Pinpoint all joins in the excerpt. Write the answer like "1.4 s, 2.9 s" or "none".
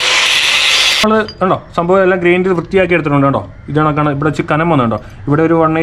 1.0 s